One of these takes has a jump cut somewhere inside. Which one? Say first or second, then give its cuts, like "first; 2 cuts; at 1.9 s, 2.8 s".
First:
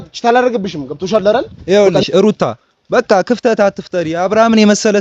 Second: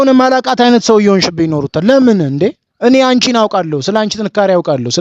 first; 1 cut; at 1.7 s